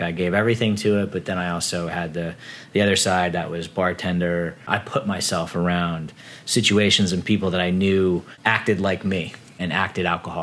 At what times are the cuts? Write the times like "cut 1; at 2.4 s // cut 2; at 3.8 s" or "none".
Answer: cut 1; at 4.6 s // cut 2; at 8.3 s // cut 3; at 9.5 s